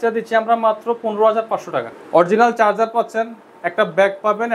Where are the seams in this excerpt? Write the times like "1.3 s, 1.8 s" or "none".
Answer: 1.9 s